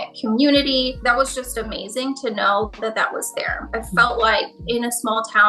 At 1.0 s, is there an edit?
yes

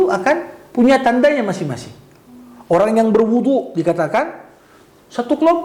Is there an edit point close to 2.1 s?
no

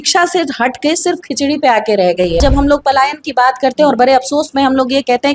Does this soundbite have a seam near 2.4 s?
yes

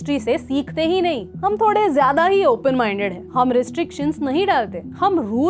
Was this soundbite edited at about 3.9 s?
no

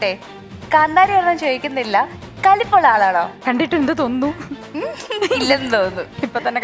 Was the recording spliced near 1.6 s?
no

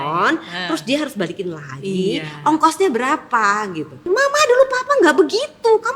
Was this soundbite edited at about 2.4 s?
no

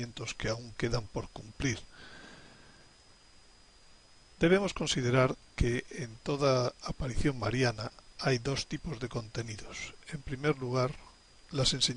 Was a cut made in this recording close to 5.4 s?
yes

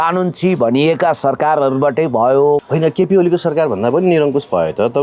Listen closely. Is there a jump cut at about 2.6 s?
yes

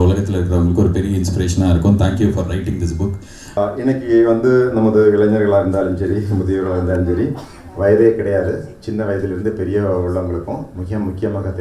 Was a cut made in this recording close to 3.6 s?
yes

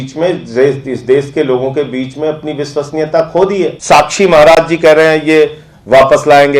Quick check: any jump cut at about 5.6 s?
no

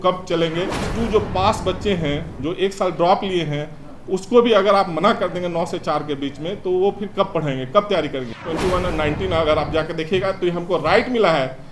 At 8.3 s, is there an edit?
yes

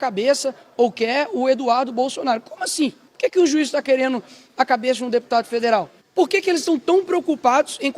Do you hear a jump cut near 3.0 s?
yes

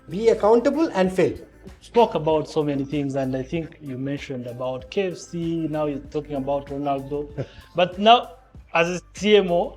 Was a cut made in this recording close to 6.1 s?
no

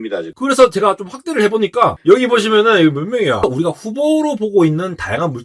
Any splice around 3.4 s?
yes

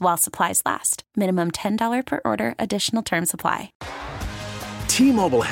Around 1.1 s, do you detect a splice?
no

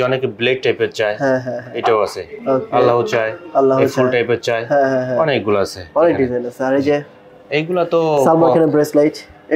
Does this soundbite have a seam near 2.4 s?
no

